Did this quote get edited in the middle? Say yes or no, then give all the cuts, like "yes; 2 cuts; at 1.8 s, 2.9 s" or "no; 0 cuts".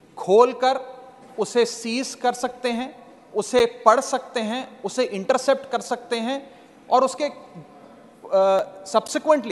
no; 0 cuts